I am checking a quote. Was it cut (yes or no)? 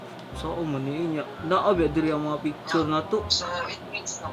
no